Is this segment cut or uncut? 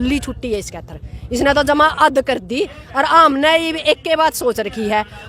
uncut